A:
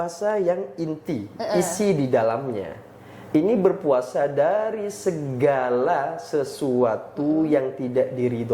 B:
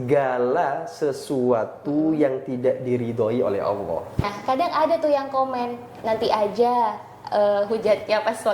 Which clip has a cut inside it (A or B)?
B